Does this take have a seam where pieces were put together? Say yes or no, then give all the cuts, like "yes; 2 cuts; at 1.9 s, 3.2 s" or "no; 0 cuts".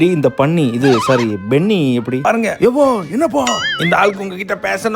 yes; 1 cut; at 2.2 s